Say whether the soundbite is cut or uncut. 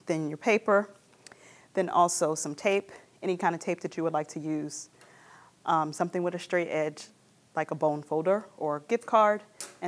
uncut